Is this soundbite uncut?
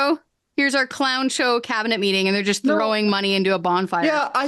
yes; 0 cuts

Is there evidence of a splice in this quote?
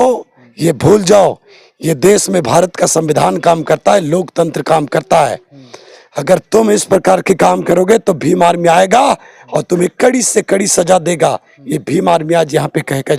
no; 0 cuts

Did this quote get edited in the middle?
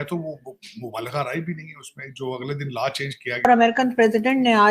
yes; 1 cut; at 3.5 s

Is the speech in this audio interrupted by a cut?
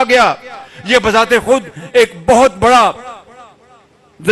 no; 0 cuts

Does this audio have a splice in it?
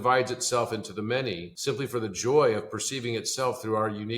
yes; 1 cut; at 1.5 s

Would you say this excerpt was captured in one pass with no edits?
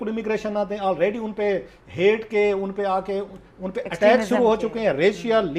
yes; 0 cuts

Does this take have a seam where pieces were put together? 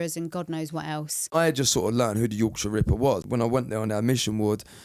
yes; 2 cuts; at 1.3 s, 3.2 s

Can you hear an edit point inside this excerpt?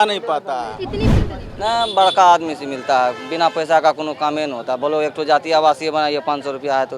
yes; 1 cut; at 1.1 s

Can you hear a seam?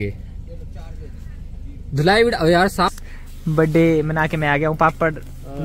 yes; 1 cut; at 3.0 s

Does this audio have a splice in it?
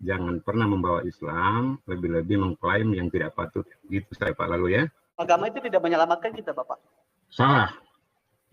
yes; 1 cut; at 5.2 s

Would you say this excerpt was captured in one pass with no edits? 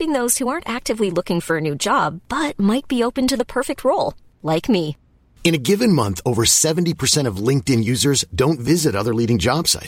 yes; 0 cuts

